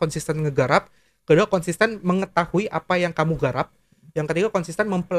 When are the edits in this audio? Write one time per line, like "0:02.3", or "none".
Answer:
none

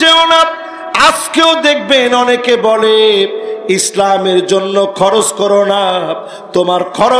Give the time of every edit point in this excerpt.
none

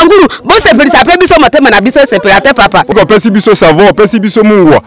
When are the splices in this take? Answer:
0:02.9

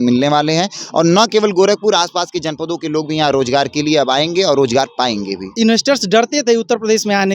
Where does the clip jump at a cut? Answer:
0:05.5

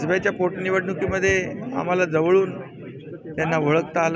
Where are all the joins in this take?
none

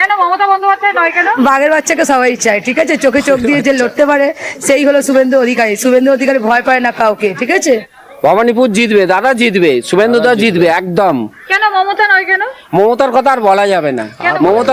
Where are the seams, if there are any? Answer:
0:07.6

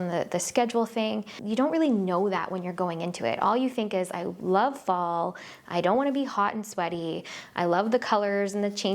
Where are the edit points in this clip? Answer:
0:01.4

